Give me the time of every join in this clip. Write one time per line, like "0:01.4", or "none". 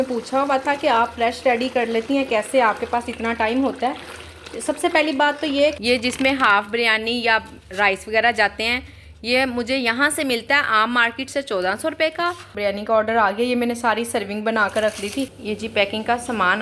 0:05.8
0:12.5
0:15.4